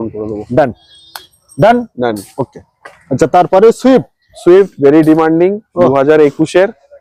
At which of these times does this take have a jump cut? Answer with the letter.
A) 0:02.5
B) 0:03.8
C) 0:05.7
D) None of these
D